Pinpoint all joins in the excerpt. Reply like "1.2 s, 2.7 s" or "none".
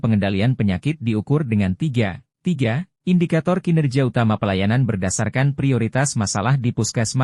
none